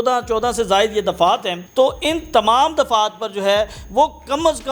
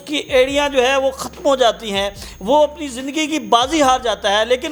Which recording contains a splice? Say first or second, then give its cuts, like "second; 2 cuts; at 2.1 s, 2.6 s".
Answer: first; 1 cut; at 1.6 s